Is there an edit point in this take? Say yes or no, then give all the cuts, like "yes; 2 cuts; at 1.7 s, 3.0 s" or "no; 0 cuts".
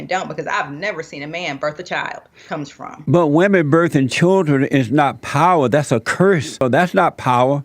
yes; 2 cuts; at 2.3 s, 6.6 s